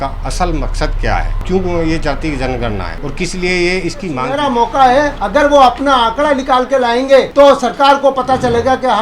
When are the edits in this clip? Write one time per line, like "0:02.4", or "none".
0:01.3
0:03.0
0:04.3
0:05.2
0:07.3